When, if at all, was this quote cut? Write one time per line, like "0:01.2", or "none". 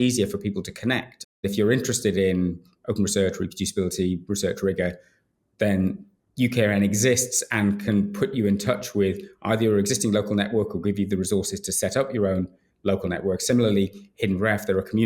0:01.4